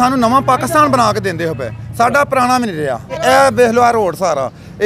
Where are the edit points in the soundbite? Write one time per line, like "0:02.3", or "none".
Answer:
0:03.1

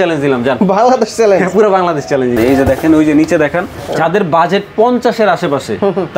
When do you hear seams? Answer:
0:02.3
0:03.9

